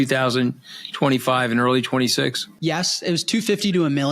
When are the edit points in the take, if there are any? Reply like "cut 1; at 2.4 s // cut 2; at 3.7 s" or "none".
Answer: cut 1; at 2.5 s